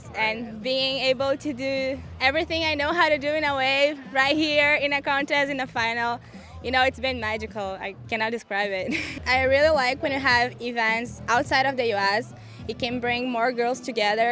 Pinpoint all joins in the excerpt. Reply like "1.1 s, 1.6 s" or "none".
9.2 s